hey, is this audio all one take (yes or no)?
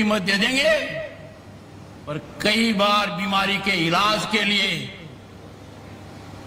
no